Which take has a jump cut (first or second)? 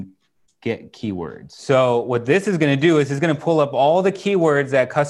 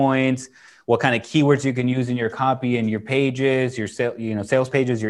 first